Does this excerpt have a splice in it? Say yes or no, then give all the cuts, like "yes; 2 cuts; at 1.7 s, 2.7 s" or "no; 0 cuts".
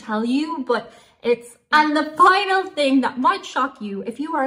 yes; 1 cut; at 1.5 s